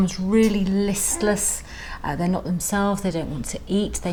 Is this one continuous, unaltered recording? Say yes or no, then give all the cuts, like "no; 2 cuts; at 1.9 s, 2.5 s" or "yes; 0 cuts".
yes; 0 cuts